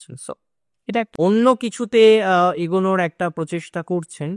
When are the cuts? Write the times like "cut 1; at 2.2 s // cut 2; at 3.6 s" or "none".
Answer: cut 1; at 1.1 s